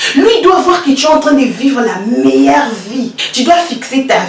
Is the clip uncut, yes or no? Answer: no